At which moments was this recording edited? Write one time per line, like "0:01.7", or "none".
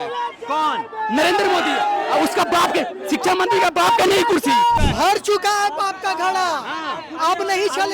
0:04.9